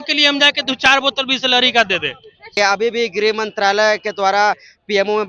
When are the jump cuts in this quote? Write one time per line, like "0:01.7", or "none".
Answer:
0:02.5